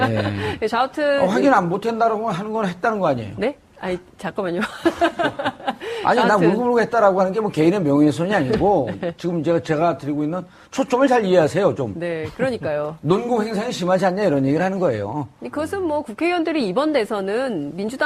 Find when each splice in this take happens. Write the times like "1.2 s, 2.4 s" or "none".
13.0 s